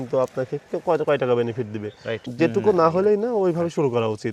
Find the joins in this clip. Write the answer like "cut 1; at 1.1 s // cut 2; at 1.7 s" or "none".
cut 1; at 1.9 s